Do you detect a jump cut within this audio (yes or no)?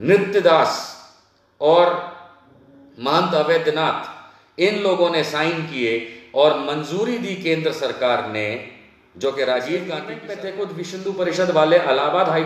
yes